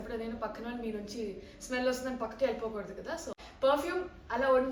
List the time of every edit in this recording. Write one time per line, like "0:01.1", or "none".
0:03.4

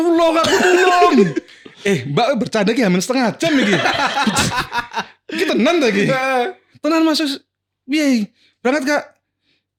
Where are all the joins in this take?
none

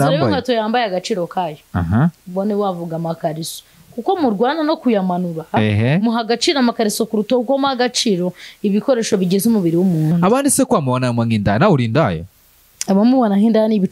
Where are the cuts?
0:10.1

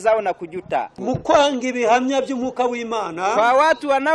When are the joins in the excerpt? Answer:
0:01.0

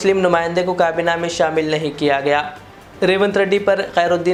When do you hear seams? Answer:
none

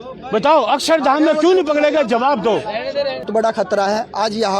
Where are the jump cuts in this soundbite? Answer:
0:03.2

